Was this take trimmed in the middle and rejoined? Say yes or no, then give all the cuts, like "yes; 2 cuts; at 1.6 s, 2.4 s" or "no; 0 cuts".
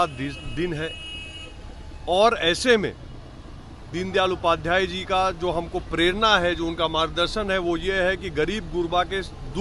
no; 0 cuts